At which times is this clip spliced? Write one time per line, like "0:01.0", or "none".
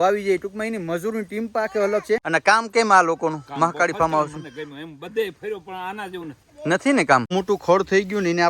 0:02.2
0:07.3